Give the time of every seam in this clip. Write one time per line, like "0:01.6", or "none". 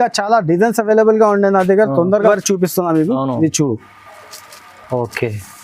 0:02.3